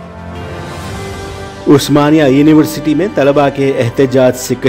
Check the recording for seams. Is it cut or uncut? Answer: uncut